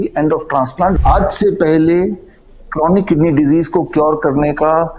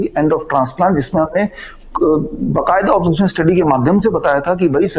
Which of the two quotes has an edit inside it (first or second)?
first